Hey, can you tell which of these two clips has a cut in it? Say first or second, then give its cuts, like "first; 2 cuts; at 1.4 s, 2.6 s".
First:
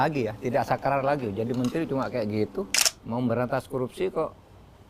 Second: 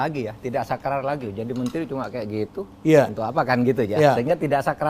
first; 1 cut; at 2.7 s